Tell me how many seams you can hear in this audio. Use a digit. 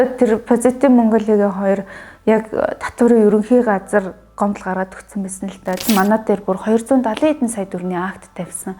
1